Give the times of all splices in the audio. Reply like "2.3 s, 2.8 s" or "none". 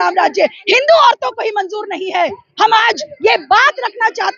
none